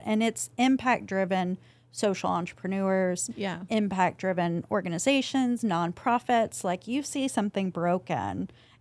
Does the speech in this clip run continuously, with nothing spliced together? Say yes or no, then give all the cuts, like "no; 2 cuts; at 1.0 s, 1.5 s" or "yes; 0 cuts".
yes; 0 cuts